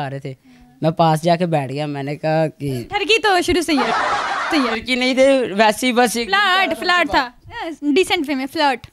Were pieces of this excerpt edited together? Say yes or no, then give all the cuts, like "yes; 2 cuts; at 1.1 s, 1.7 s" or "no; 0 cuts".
no; 0 cuts